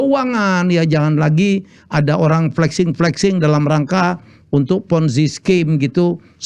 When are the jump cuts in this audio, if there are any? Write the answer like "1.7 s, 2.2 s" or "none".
none